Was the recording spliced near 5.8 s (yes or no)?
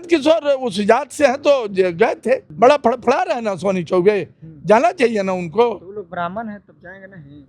no